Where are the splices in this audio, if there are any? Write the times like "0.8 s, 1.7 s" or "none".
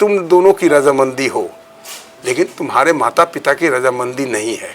none